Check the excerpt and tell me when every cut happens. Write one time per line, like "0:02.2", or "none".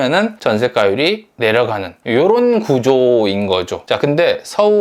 none

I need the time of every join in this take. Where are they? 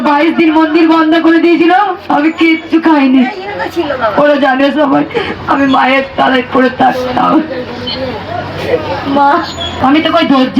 0:09.7

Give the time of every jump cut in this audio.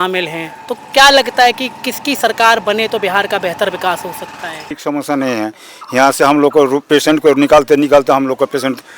0:04.8

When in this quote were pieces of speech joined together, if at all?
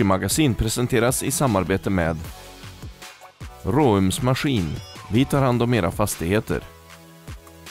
0:06.7

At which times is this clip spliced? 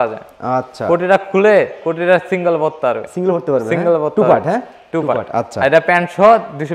none

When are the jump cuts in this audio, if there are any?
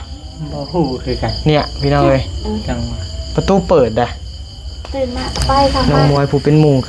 0:05.9

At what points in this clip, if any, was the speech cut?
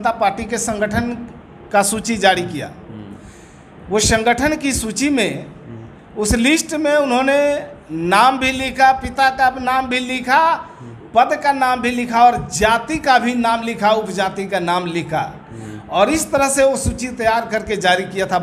none

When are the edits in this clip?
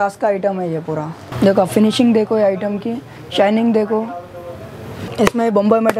0:01.3
0:05.1

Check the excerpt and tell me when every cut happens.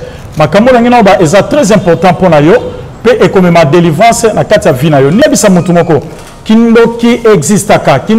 0:05.2

